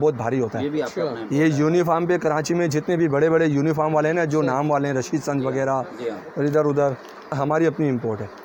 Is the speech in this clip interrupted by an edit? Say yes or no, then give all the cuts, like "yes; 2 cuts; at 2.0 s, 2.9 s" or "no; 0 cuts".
no; 0 cuts